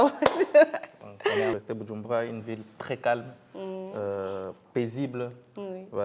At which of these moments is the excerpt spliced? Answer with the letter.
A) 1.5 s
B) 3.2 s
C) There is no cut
A